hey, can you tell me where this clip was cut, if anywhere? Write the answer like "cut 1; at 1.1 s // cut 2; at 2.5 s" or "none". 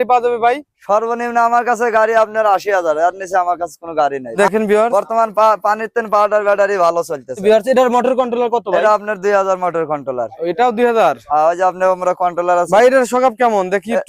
cut 1; at 4.4 s // cut 2; at 7.4 s